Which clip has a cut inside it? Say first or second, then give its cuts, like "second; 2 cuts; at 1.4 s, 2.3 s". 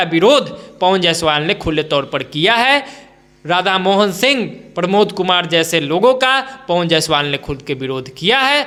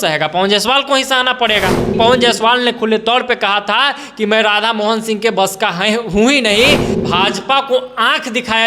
second; 2 cuts; at 1.9 s, 6.9 s